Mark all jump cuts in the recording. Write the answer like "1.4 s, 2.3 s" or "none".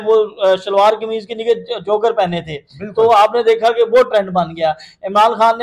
none